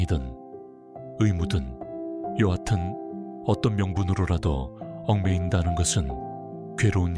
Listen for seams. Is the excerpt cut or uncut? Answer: uncut